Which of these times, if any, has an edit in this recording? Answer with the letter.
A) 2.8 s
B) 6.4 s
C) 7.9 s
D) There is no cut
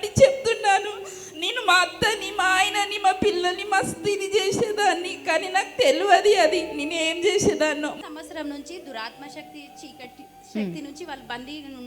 C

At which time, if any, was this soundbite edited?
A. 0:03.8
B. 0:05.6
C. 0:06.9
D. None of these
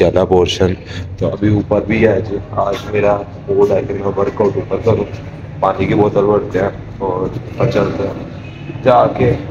D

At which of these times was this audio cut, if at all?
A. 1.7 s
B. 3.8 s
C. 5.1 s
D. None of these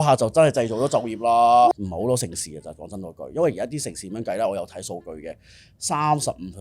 A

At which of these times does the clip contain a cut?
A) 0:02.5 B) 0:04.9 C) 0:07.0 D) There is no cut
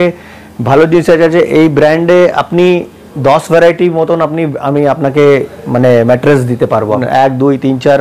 C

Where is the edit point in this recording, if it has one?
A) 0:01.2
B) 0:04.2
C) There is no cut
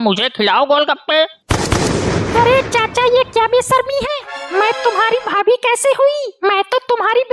C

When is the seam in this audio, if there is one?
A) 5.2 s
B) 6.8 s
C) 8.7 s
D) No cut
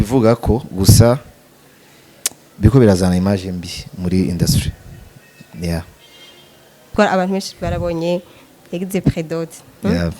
B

